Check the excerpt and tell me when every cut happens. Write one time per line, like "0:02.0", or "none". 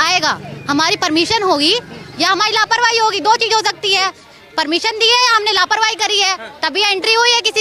none